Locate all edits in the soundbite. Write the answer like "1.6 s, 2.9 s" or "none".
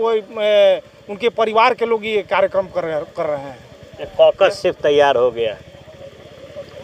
none